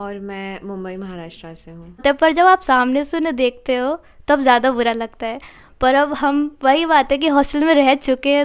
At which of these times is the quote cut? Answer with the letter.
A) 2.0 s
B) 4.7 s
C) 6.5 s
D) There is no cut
A